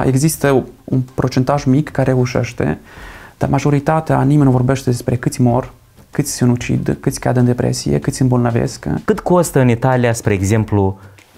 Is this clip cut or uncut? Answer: cut